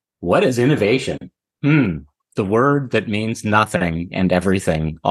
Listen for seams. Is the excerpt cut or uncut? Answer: uncut